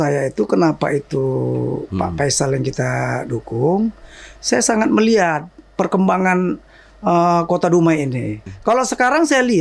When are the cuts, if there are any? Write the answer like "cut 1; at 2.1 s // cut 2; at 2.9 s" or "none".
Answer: cut 1; at 8.5 s